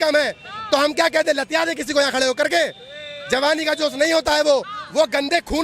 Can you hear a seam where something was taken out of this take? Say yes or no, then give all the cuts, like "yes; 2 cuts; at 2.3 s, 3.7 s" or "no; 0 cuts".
no; 0 cuts